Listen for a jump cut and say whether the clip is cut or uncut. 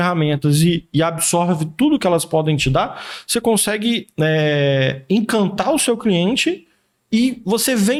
uncut